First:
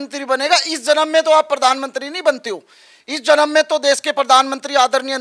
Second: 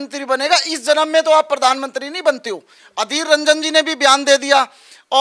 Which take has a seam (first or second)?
second